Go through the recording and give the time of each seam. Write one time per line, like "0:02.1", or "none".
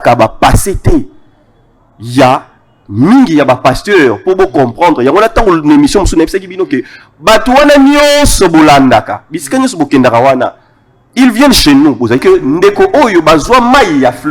0:12.2